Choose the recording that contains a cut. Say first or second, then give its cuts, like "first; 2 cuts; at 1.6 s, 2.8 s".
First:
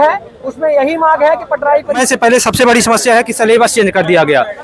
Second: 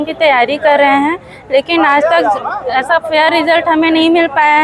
first; 1 cut; at 2.0 s